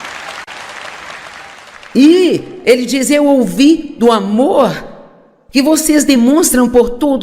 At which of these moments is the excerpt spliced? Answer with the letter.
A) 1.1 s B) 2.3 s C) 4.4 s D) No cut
C